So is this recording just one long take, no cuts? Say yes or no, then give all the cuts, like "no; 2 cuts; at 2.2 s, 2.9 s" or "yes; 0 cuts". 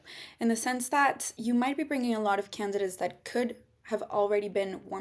no; 1 cut; at 1.3 s